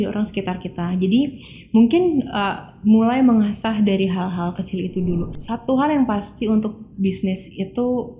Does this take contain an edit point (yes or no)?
yes